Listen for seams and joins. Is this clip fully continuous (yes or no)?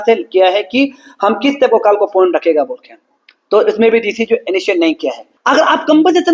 no